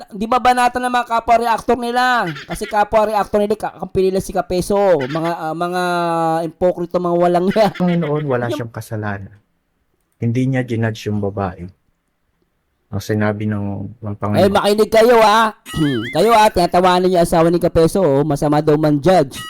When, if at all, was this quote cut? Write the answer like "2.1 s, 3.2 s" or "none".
7.8 s